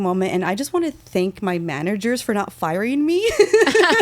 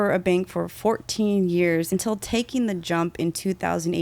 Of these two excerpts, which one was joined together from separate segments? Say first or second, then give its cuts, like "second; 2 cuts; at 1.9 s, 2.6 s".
second; 1 cut; at 1.9 s